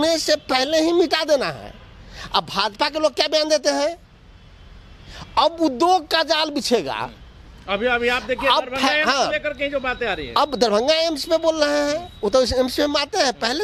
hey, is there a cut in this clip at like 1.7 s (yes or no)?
no